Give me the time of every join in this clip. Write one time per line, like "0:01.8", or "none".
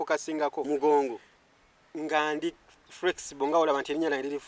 none